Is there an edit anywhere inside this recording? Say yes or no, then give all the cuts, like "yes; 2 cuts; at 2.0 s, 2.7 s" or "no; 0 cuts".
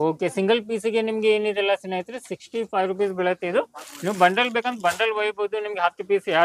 no; 0 cuts